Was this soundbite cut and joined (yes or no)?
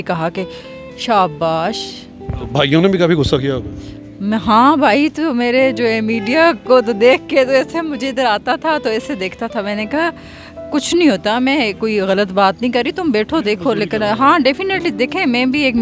no